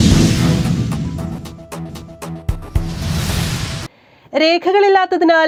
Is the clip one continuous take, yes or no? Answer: yes